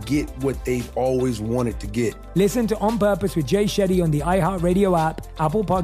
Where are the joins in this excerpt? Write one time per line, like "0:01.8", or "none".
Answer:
none